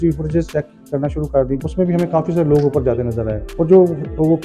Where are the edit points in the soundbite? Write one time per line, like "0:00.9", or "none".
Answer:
0:01.6
0:03.4